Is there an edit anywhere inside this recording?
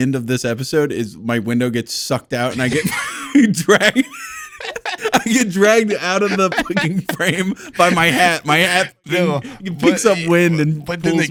no; 0 cuts

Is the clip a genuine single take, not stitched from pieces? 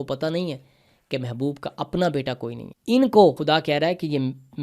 no; 2 cuts; at 2.7 s, 3.4 s

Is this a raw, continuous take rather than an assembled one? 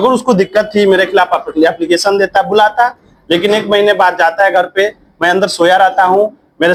yes; 0 cuts

